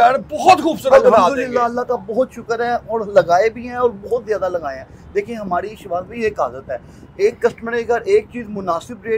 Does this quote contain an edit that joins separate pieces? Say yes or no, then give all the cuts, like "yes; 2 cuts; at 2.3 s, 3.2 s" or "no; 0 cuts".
no; 0 cuts